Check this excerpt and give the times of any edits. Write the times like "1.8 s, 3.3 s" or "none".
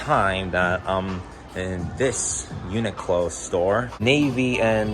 3.9 s